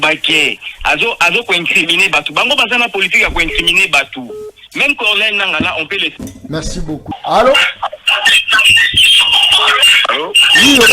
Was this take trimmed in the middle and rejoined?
yes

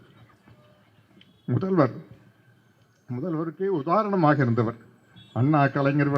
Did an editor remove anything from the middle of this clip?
no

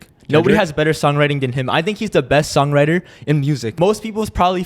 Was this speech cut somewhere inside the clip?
yes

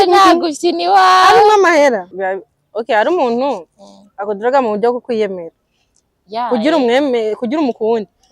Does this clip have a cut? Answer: yes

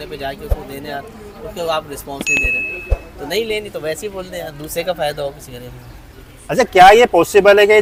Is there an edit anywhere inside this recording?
no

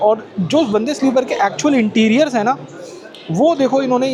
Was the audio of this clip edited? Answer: no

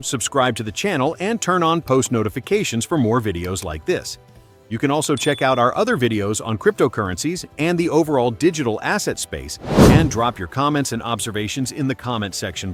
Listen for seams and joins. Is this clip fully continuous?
yes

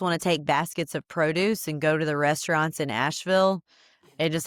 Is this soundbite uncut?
yes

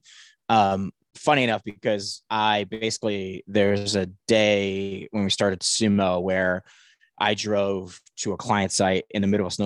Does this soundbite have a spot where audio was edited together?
no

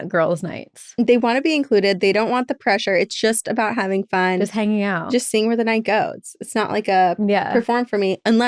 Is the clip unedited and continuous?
yes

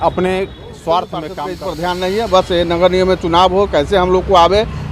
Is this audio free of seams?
no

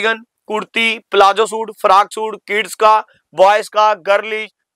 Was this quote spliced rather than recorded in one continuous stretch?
no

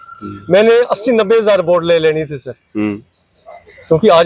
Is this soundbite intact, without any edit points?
yes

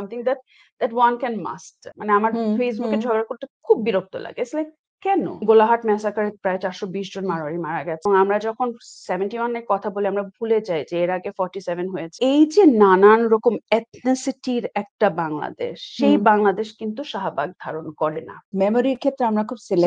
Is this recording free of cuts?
no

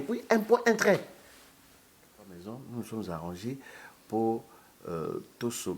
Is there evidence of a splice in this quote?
yes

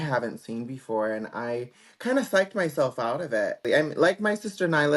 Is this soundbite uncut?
no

